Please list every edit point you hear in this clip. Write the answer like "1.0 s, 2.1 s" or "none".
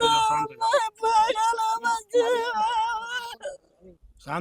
none